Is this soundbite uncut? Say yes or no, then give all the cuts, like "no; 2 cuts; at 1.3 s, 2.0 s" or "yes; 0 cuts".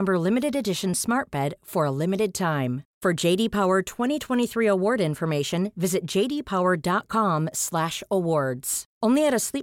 yes; 0 cuts